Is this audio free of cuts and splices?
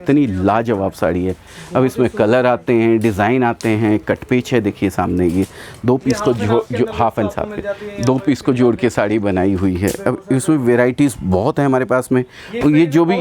yes; 0 cuts

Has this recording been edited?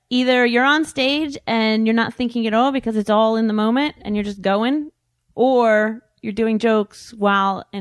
yes; 1 cut; at 5.0 s

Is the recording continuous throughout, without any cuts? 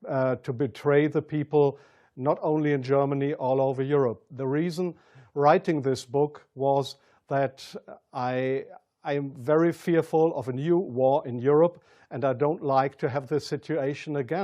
yes; 0 cuts

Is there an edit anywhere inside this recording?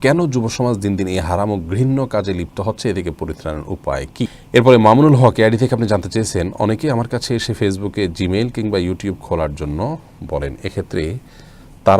yes; 1 cut; at 4.4 s

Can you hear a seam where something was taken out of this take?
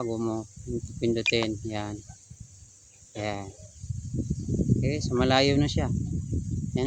no; 0 cuts

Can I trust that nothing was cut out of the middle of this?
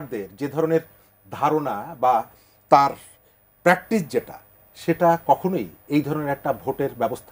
yes; 0 cuts

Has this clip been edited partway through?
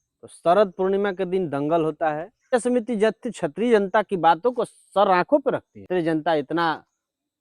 yes; 2 cuts; at 2.5 s, 5.9 s

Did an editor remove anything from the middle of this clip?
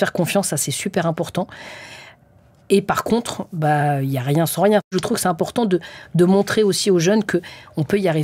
yes; 1 cut; at 4.9 s

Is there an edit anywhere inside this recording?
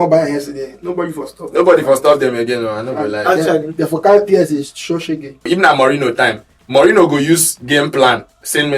yes; 1 cut; at 5.4 s

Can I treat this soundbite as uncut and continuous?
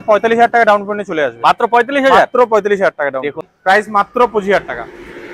no; 1 cut; at 3.5 s

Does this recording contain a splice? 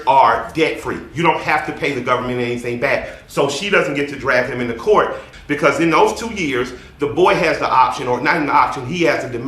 yes; 1 cut; at 5.3 s

